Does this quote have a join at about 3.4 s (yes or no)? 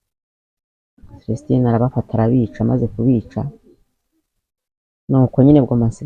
no